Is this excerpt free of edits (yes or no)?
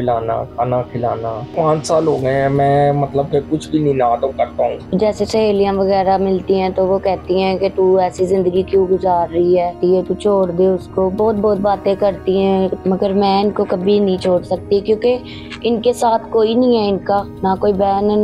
no